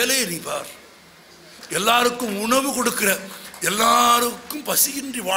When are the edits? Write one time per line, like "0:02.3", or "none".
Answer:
0:01.6